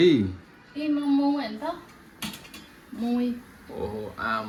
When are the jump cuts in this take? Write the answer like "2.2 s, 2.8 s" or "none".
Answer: none